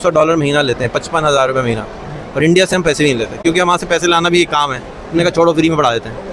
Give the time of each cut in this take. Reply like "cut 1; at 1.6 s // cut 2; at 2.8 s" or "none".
none

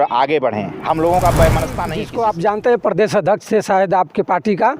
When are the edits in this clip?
cut 1; at 2.0 s

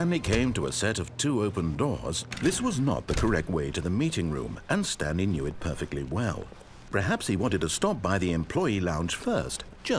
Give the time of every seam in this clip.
cut 1; at 2.4 s

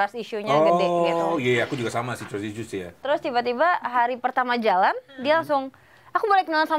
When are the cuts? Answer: cut 1; at 3.0 s

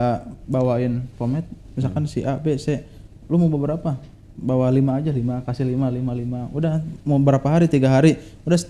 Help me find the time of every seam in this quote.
none

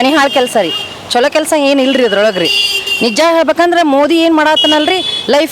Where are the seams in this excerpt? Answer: none

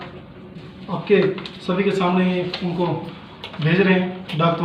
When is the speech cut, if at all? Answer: none

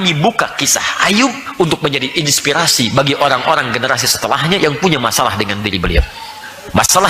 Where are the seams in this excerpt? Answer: none

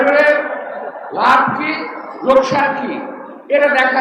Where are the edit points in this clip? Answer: none

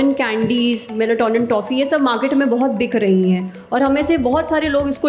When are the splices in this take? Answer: none

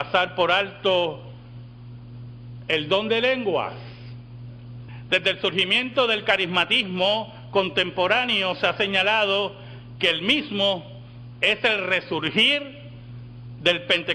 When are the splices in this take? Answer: cut 1; at 6.5 s

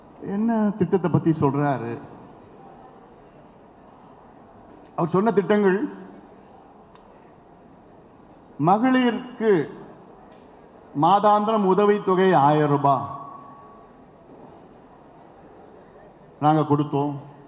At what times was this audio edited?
none

